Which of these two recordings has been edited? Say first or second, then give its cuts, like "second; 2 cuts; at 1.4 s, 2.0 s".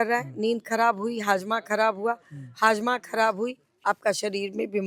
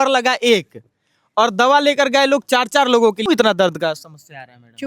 second; 1 cut; at 3.2 s